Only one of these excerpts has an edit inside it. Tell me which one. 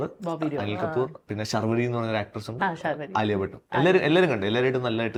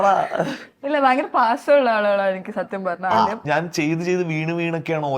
second; 1 cut; at 3.4 s

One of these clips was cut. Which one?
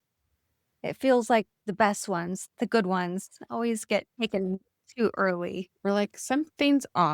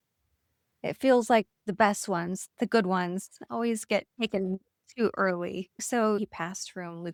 first; 1 cut; at 5.7 s

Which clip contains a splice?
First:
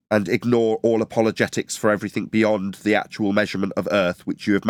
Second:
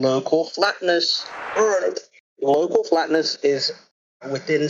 second; 1 cut; at 1.4 s

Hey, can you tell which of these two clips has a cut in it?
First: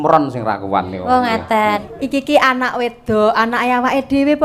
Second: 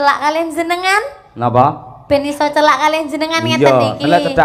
first; 1 cut; at 1.8 s

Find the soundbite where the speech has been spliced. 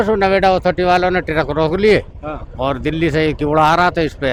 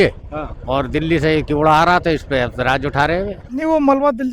second; 1 cut; at 3.4 s

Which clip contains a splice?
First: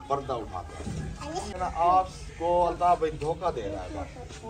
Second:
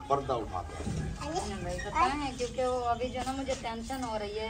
first; 1 cut; at 1.5 s

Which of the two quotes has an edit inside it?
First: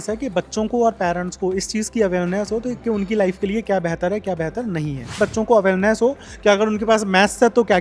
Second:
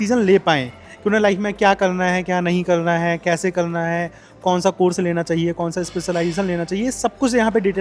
first; 1 cut; at 5.1 s

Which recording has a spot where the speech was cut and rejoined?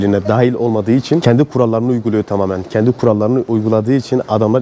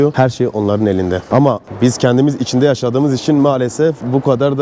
second; 1 cut; at 1.2 s

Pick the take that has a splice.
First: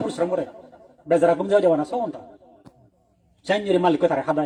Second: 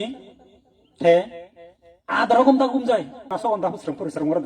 second; 1 cut; at 3.3 s

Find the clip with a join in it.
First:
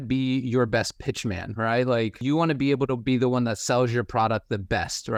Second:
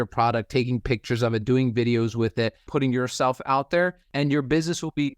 second; 2 cuts; at 2.6 s, 4.1 s

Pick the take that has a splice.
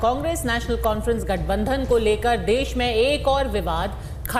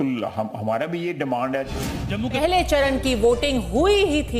second; 1 cut; at 2.4 s

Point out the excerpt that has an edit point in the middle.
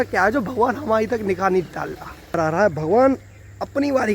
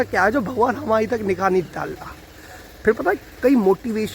first; 1 cut; at 2.4 s

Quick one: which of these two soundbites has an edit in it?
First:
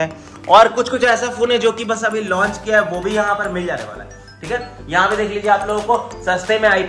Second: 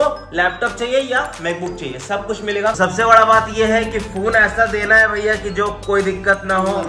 second; 1 cut; at 2.8 s

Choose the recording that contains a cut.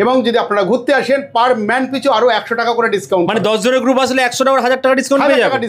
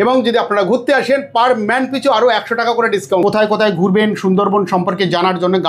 second; 1 cut; at 3.2 s

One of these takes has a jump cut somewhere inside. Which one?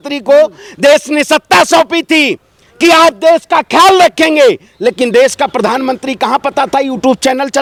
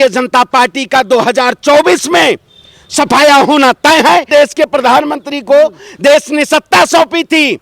second; 1 cut; at 4.3 s

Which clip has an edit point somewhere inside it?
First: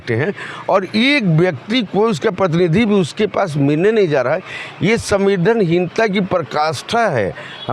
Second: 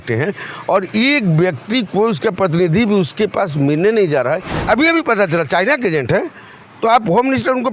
second; 1 cut; at 4.5 s

